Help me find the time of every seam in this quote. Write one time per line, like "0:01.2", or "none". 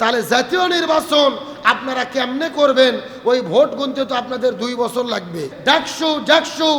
0:05.5